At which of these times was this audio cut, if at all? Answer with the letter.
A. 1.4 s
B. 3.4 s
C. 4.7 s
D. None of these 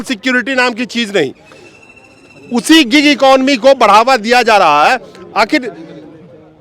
D